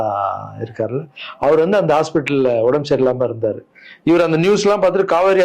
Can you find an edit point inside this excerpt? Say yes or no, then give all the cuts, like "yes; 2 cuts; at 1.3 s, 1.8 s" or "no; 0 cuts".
no; 0 cuts